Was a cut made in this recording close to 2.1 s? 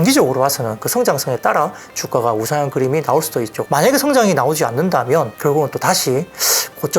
no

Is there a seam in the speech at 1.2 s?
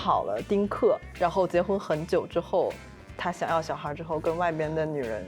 no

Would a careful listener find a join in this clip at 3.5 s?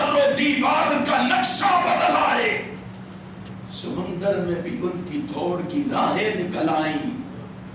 yes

